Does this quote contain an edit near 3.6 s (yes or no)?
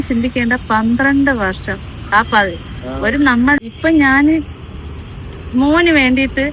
yes